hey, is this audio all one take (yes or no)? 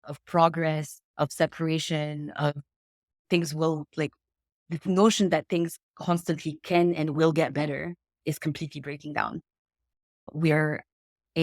no